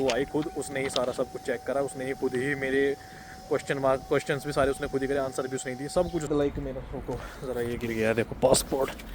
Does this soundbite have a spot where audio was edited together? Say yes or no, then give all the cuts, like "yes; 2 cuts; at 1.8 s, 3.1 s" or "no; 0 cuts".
yes; 1 cut; at 6.3 s